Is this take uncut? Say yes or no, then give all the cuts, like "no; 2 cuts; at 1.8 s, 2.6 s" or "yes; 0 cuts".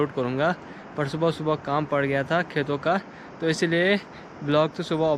yes; 0 cuts